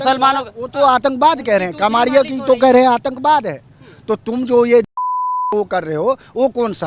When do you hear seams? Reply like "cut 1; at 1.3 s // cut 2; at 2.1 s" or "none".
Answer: none